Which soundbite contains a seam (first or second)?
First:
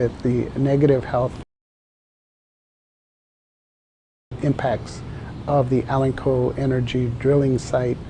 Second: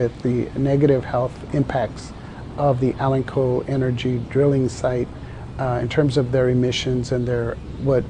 second